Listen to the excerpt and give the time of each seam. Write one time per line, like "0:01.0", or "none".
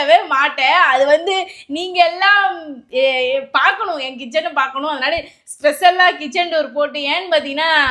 none